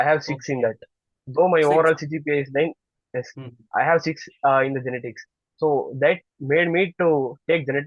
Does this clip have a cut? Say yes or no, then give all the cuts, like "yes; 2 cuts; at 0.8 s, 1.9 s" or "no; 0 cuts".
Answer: no; 0 cuts